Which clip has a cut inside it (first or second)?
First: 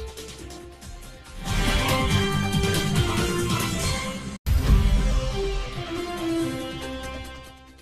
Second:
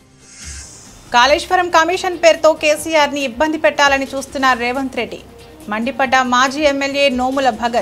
second